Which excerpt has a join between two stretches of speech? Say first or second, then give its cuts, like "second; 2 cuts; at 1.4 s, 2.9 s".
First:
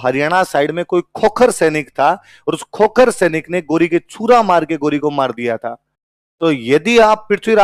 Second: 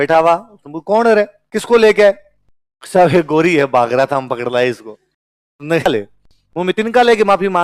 second; 1 cut; at 5.9 s